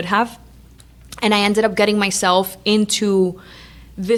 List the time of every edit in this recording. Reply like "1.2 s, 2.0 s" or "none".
none